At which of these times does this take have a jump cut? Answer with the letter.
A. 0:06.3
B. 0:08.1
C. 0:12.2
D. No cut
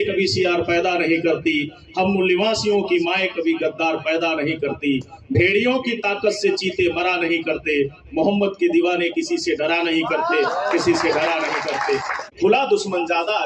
C